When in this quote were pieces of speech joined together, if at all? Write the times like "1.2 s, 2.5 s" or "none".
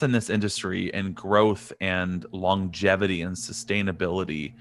none